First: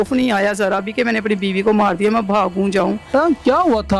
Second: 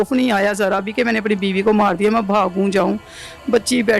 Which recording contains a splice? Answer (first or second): first